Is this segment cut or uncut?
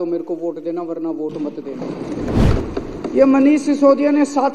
cut